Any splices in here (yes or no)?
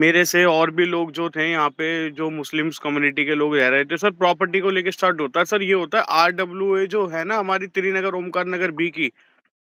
no